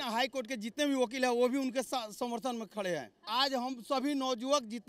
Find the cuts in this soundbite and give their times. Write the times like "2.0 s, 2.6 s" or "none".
3.2 s